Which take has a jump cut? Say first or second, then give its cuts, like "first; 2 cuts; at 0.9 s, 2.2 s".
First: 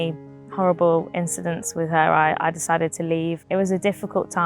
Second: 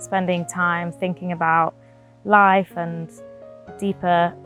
first; 1 cut; at 3.4 s